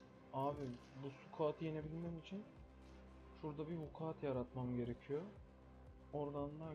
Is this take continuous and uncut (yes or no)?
yes